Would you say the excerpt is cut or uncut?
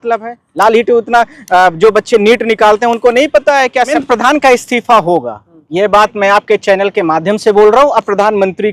cut